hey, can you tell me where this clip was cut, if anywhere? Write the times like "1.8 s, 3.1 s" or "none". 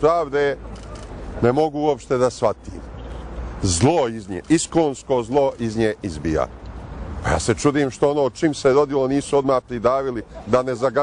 6.5 s